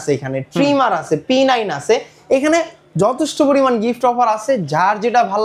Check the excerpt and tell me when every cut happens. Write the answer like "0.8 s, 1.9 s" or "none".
none

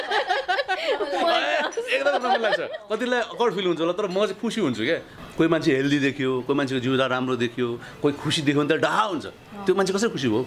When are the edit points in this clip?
5.1 s

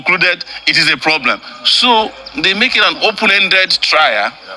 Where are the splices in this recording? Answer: none

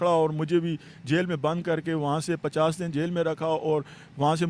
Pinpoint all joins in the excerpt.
none

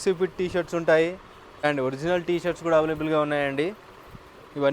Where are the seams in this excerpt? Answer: 1.6 s

